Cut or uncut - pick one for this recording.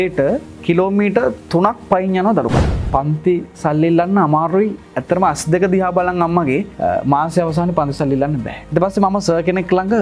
cut